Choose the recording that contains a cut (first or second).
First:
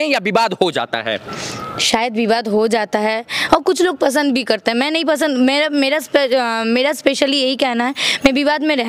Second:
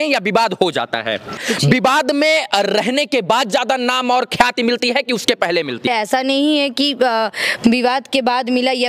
second